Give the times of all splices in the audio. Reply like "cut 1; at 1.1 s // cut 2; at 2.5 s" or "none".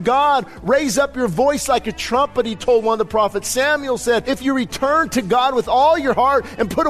cut 1; at 4.2 s